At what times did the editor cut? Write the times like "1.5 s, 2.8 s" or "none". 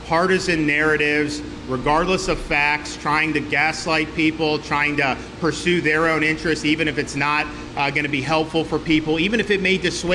none